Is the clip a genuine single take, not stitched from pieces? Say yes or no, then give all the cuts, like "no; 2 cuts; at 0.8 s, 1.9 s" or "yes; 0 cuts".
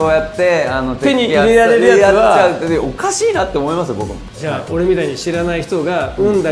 no; 1 cut; at 4.2 s